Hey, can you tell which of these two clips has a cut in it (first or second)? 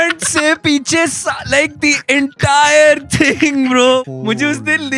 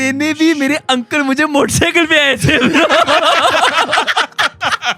first